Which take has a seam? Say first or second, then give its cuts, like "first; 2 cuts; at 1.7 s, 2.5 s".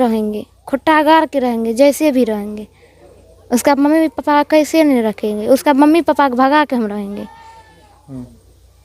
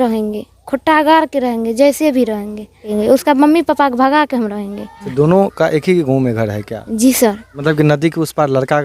second; 3 cuts; at 2.8 s, 5.0 s, 7.5 s